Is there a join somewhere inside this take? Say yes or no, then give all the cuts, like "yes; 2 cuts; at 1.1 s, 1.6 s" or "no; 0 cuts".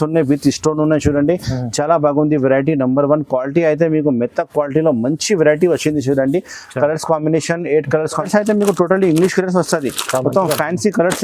yes; 1 cut; at 8.2 s